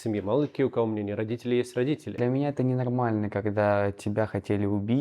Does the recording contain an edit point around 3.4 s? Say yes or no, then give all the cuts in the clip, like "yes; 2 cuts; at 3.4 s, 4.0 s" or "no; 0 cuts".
no; 1 cut; at 2.2 s